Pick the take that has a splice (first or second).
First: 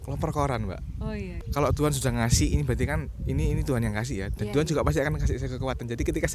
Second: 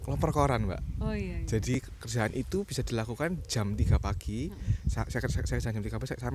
first